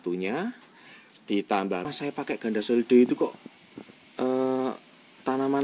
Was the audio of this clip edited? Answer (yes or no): yes